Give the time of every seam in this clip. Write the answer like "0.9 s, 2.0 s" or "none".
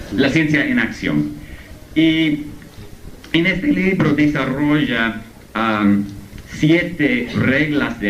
4.0 s